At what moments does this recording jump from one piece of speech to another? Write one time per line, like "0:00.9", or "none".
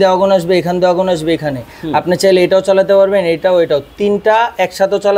none